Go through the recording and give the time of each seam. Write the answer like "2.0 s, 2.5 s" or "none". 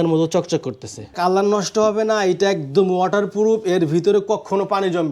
1.1 s